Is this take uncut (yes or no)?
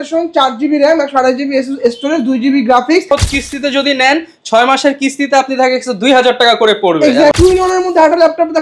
no